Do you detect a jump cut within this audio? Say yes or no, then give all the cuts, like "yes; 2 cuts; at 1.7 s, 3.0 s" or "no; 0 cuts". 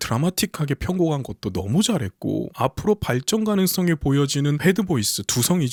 no; 0 cuts